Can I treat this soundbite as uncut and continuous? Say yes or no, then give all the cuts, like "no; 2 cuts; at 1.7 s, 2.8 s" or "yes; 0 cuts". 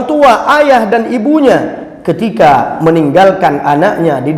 yes; 0 cuts